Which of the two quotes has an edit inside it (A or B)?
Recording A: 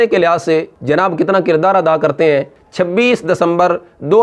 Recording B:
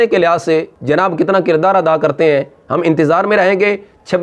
A